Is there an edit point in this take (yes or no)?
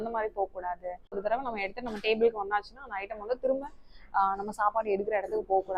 yes